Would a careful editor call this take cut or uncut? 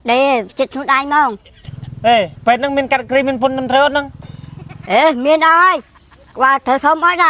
uncut